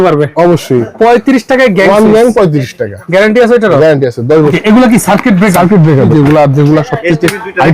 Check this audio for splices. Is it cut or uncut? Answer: cut